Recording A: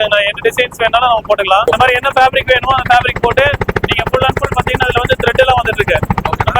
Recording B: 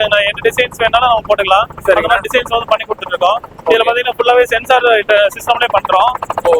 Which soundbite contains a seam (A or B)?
A